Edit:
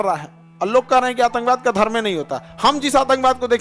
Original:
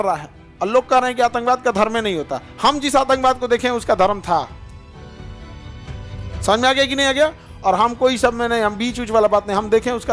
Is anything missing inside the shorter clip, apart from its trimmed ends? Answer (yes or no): no